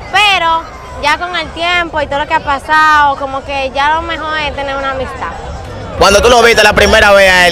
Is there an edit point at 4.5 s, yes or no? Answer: no